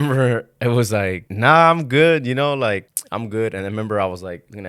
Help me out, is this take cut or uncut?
cut